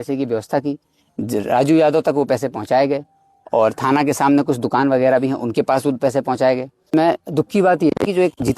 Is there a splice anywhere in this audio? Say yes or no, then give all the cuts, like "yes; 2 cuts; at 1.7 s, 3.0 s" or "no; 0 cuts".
yes; 1 cut; at 6.9 s